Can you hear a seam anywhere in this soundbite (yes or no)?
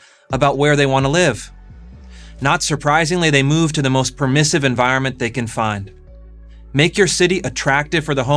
no